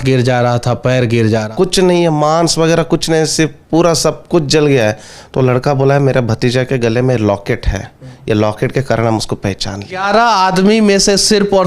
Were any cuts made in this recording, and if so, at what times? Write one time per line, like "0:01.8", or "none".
0:01.5
0:10.0